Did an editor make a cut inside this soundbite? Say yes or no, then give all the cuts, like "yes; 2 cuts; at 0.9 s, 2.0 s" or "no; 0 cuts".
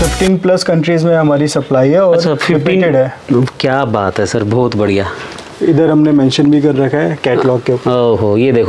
no; 0 cuts